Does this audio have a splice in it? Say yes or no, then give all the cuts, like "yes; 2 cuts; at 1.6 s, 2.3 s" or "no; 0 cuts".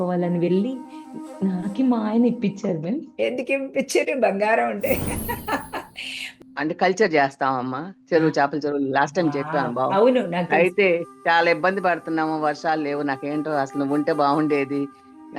yes; 1 cut; at 6.4 s